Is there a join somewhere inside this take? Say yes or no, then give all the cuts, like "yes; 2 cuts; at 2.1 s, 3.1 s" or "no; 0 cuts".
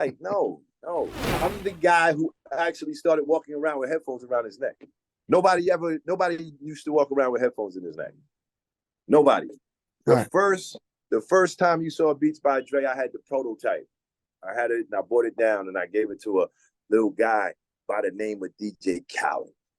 yes; 1 cut; at 1.2 s